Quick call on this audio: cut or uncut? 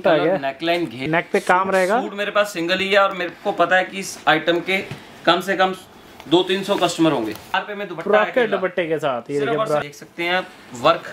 cut